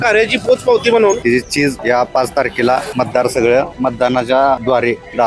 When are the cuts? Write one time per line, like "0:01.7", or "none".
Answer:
0:01.6
0:02.9
0:03.7